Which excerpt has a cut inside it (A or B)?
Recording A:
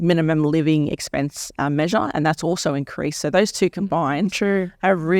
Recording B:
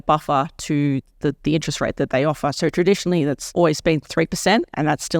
B